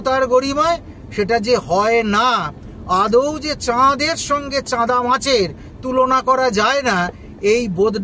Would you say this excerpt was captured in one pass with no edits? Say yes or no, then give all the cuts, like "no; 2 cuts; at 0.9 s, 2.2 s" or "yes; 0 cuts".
yes; 0 cuts